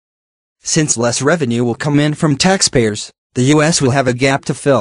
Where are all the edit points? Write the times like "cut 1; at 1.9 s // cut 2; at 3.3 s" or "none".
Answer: none